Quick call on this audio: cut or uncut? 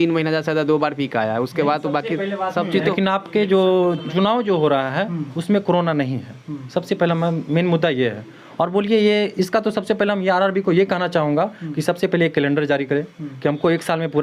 cut